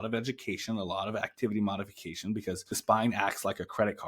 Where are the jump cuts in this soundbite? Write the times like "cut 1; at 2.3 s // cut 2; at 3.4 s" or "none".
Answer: cut 1; at 2.7 s